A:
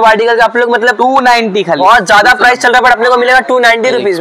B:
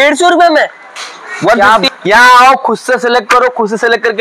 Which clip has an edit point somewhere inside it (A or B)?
B